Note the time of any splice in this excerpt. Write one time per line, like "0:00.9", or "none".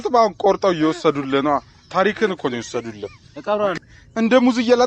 0:03.7